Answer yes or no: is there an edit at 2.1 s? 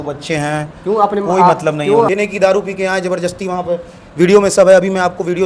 yes